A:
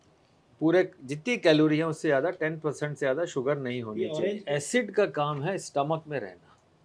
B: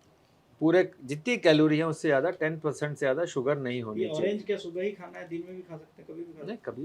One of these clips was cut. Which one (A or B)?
A